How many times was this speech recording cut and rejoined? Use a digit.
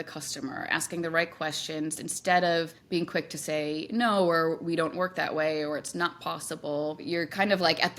2